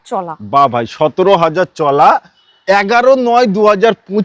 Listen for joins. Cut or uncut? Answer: uncut